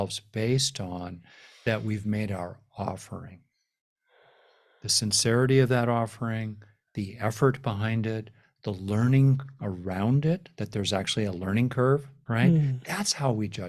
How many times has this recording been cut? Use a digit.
1